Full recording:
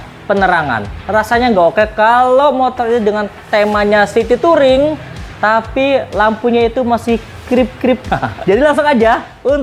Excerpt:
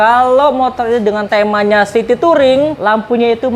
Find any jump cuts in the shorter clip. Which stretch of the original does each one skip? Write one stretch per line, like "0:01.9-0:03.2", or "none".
0:03.2-0:03.4
0:05.0-0:06.1